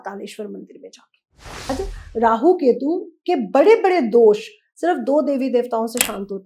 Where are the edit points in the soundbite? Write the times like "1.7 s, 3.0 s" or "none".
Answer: 1.7 s